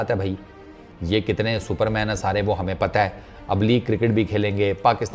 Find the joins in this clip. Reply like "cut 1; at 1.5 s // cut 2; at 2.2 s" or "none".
cut 1; at 1.0 s

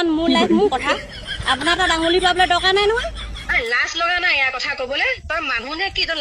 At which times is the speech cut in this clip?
none

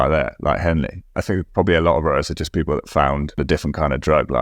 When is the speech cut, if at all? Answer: cut 1; at 1.2 s // cut 2; at 3.4 s

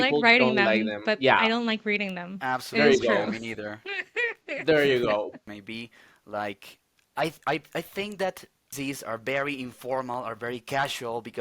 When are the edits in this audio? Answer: cut 1; at 5.4 s // cut 2; at 8.7 s

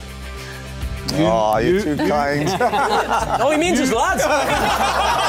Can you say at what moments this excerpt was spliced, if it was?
none

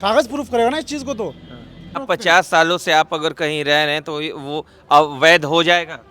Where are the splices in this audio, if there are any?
cut 1; at 2.0 s

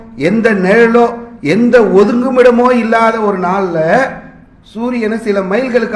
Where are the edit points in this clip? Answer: none

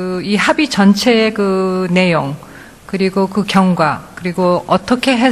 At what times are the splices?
cut 1; at 3.3 s

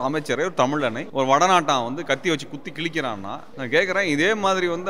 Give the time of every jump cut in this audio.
cut 1; at 1.0 s // cut 2; at 3.5 s

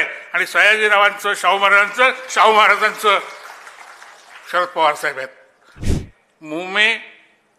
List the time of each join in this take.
cut 1; at 5.8 s

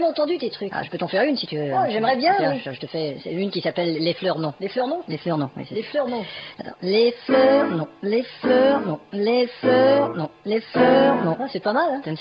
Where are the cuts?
cut 1; at 3.2 s

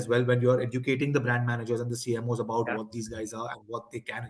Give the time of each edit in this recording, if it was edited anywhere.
none

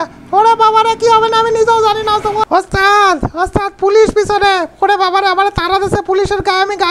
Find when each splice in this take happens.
cut 1; at 2.5 s

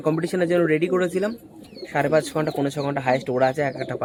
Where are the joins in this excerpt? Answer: none

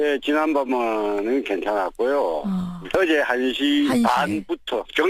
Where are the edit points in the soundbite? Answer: cut 1; at 1.1 s

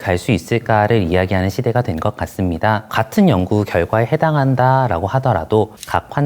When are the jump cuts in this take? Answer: cut 1; at 2.9 s

